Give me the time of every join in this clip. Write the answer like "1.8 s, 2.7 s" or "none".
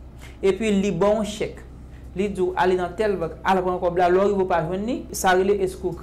5.1 s